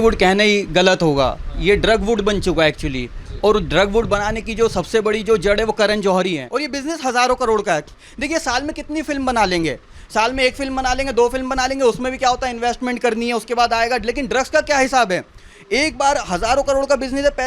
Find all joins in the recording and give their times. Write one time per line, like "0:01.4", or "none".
0:06.5